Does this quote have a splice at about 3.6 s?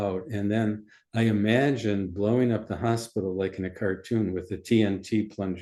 no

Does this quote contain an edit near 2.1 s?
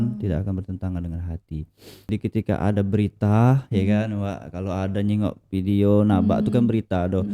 yes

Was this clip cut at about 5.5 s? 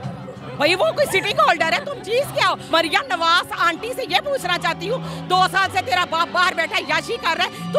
no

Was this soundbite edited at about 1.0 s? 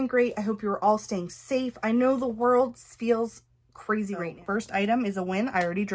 no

